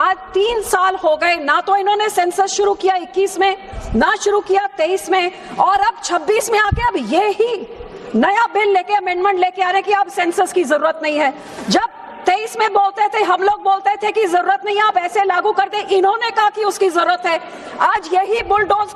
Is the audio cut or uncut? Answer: uncut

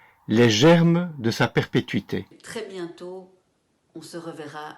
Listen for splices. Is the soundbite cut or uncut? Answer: cut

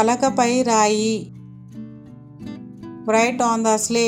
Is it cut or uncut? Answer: uncut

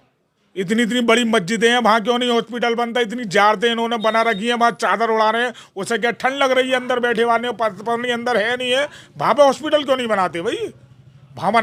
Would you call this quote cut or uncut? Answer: uncut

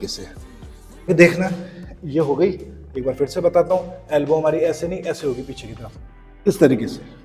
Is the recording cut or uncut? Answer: cut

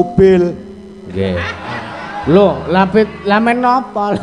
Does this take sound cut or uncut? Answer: uncut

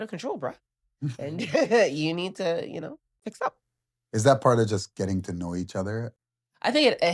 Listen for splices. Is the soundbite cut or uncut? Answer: cut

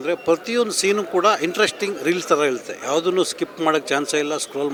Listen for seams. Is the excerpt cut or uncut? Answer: uncut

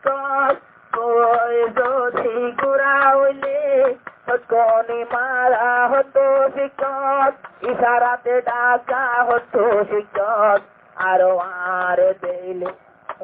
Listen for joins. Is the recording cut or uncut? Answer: uncut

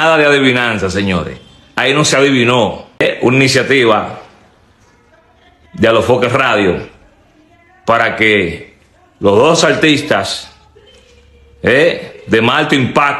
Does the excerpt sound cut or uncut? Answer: cut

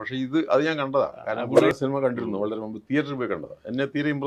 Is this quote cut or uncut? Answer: cut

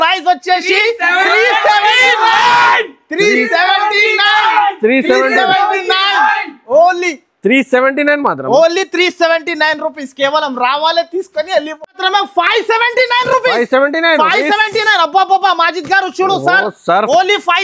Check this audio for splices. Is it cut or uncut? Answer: cut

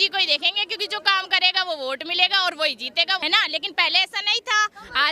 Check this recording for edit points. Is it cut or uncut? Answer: cut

